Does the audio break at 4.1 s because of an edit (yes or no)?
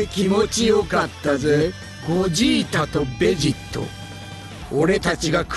no